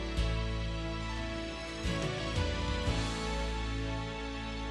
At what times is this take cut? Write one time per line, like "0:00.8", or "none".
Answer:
none